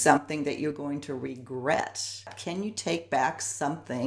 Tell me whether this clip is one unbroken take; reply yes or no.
no